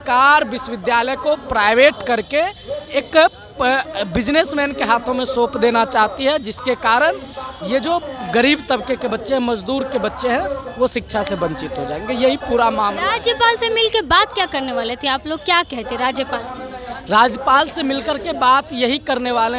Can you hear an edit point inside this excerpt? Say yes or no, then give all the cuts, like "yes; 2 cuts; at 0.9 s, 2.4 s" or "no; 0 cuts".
no; 0 cuts